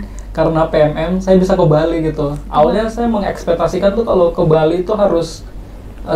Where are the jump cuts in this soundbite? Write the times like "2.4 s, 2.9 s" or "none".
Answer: none